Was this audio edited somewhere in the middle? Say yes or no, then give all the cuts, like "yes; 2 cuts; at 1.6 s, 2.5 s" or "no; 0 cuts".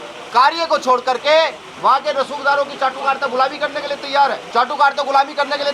no; 0 cuts